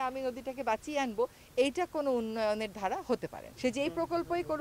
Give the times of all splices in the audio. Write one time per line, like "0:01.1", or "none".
0:03.4